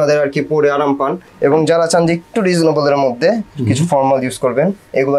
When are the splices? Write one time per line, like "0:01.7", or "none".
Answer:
0:01.2